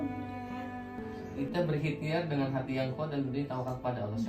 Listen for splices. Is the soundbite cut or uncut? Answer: cut